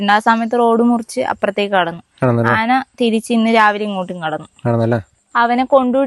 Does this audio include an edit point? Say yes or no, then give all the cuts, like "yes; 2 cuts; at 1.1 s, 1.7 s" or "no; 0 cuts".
yes; 1 cut; at 5.2 s